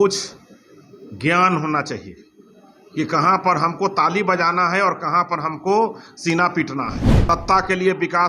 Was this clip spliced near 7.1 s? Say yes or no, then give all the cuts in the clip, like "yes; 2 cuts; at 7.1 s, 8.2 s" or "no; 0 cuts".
yes; 1 cut; at 7.1 s